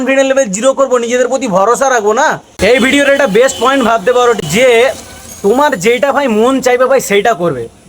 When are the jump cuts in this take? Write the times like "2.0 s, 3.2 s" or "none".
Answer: 2.5 s